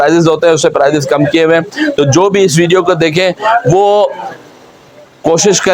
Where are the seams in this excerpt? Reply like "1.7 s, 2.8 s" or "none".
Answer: none